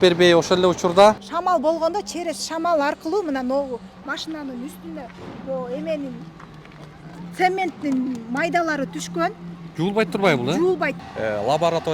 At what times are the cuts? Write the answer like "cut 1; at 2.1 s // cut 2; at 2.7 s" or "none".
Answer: cut 1; at 1.3 s // cut 2; at 11.0 s